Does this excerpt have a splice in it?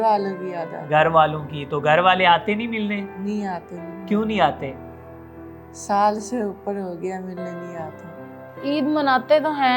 yes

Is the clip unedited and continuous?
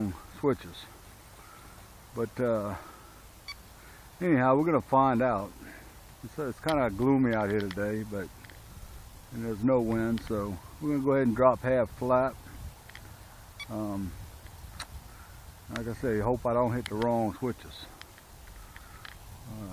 yes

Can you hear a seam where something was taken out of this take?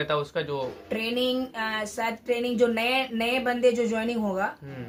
no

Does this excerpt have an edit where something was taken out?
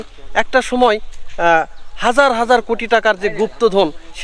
no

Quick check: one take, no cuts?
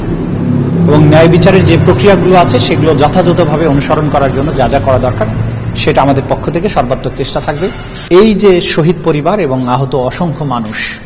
no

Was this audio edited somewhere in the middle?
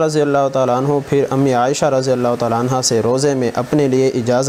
no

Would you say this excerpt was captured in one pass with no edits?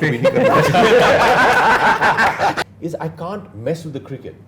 no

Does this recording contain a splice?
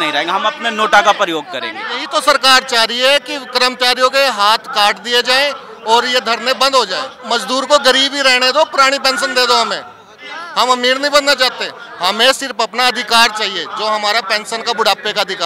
yes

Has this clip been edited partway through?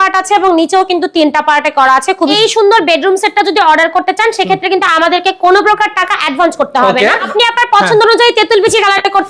yes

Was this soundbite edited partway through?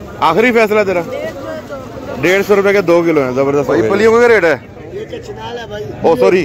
yes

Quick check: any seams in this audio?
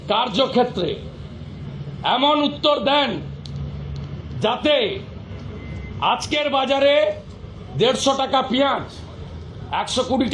no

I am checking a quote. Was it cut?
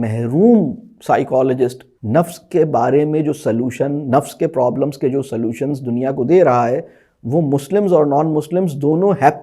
yes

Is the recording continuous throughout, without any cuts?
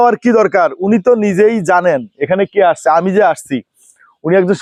yes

